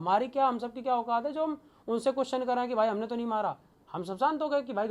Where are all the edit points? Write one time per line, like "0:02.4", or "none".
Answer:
none